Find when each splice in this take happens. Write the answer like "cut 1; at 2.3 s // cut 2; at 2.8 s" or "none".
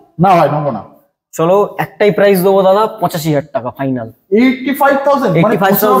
none